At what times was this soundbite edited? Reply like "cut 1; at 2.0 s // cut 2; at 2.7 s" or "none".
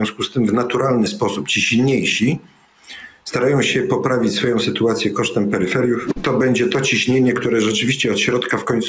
cut 1; at 6.2 s